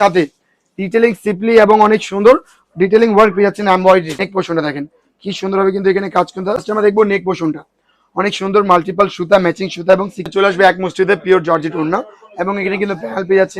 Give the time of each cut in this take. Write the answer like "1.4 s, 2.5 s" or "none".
4.1 s, 6.6 s, 10.2 s